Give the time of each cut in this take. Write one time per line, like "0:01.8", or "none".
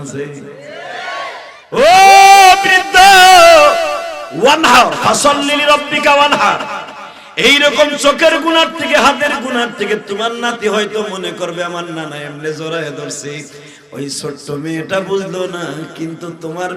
0:01.5

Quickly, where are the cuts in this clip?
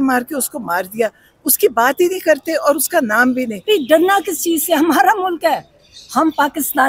0:03.6

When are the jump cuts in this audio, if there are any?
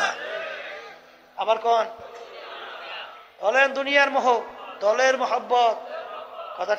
0:02.1
0:04.6

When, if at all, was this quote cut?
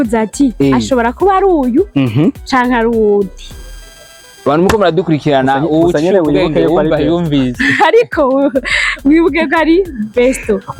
none

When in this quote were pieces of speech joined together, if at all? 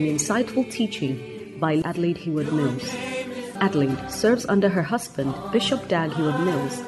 0:01.8
0:03.5

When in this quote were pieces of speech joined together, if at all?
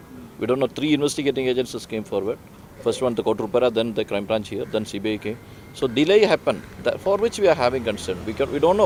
none

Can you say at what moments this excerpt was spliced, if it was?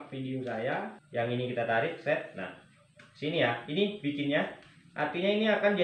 0:01.0

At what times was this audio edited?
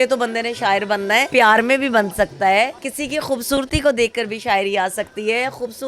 0:01.3
0:02.9

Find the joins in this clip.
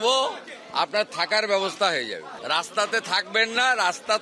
0:02.3

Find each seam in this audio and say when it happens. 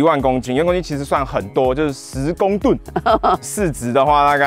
0:03.4

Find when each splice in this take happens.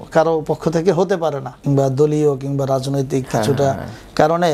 0:01.5

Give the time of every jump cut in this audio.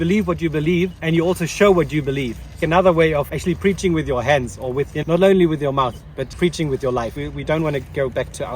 0:01.0
0:02.6
0:03.3
0:04.9
0:06.3
0:07.2

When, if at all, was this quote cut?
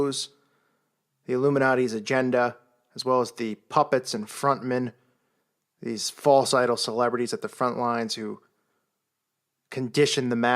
0:02.9

